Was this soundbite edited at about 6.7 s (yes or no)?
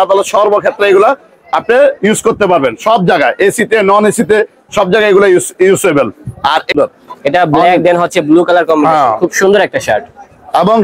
yes